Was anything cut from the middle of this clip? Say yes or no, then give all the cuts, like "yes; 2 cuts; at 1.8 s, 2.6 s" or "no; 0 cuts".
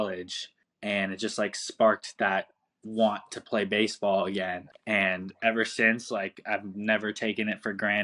no; 0 cuts